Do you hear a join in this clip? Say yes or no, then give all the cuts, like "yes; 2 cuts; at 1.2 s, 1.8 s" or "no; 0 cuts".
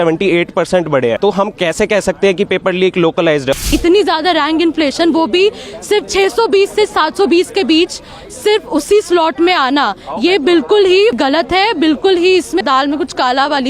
yes; 4 cuts; at 1.2 s, 3.6 s, 11.2 s, 12.6 s